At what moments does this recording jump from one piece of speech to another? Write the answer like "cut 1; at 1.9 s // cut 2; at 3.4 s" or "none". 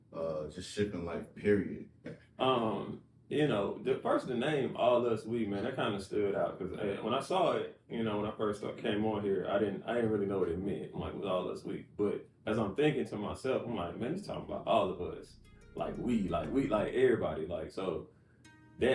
cut 1; at 2.2 s